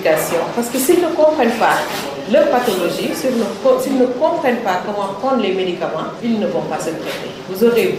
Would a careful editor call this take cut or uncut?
uncut